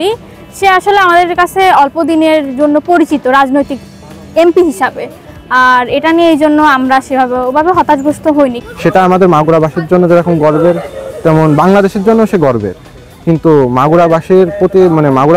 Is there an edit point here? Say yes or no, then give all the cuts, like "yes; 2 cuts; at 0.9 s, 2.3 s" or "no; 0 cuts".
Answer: no; 0 cuts